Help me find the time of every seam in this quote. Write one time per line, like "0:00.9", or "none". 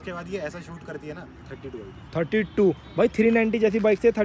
0:01.5